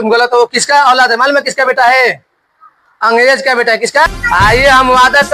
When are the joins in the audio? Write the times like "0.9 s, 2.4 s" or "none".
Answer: 4.1 s